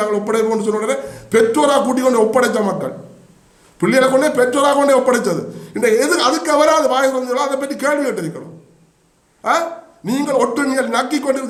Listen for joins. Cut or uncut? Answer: uncut